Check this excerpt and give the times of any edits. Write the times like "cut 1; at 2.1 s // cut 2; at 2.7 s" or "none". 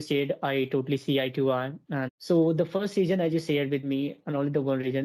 cut 1; at 2.1 s